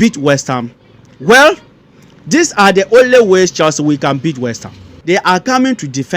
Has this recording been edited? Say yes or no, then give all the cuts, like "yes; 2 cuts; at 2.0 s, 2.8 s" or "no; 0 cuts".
yes; 1 cut; at 4.9 s